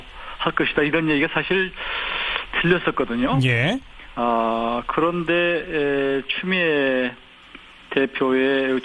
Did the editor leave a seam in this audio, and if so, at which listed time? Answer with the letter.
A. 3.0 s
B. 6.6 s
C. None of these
A